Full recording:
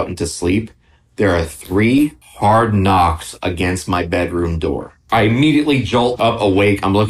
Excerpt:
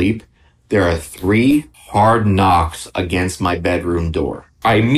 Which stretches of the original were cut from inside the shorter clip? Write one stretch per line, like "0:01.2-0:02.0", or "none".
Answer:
none